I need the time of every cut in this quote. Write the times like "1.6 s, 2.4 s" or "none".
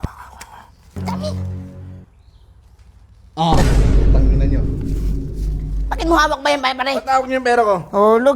1.0 s